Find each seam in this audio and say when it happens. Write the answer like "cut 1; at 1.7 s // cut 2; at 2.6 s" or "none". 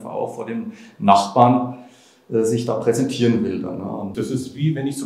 cut 1; at 4.1 s